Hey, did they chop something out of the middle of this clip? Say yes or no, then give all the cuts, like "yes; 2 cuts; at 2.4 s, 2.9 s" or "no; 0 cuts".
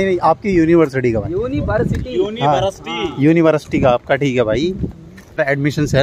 no; 0 cuts